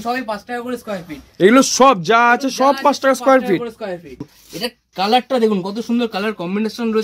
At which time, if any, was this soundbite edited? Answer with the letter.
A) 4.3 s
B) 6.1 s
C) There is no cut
A